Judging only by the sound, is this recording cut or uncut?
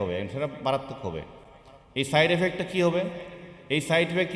uncut